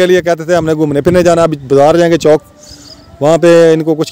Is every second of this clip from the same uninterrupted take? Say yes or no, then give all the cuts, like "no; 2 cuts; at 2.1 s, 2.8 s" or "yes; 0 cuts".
yes; 0 cuts